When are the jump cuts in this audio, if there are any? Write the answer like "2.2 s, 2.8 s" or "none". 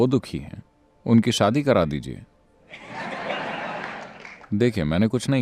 none